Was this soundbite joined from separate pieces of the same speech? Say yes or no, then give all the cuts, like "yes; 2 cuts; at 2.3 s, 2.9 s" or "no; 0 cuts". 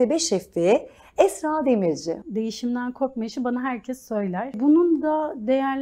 yes; 2 cuts; at 2.2 s, 4.5 s